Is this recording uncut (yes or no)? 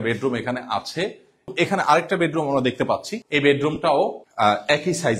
no